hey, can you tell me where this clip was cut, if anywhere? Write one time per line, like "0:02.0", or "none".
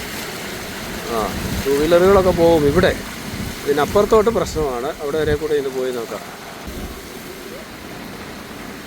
0:06.7